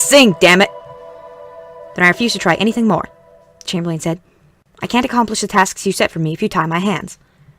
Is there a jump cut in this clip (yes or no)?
yes